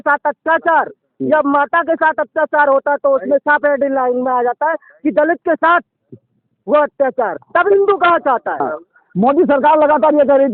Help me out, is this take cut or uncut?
cut